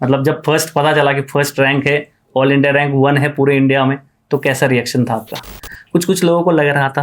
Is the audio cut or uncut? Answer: cut